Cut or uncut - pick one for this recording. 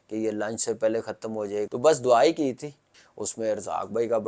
cut